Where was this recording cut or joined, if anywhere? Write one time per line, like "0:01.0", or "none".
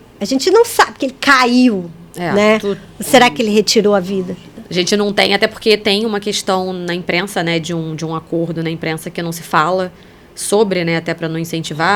none